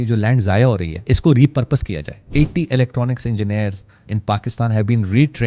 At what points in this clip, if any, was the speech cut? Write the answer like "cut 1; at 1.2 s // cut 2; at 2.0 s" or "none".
cut 1; at 0.9 s // cut 2; at 2.2 s